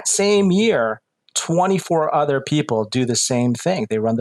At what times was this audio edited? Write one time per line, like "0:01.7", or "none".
none